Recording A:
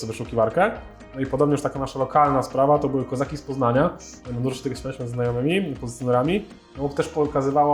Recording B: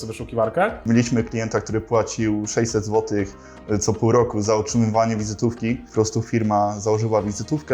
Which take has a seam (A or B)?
B